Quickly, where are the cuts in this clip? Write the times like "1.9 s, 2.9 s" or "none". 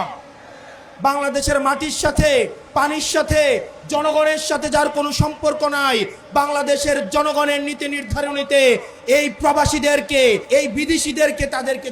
0.9 s, 10.4 s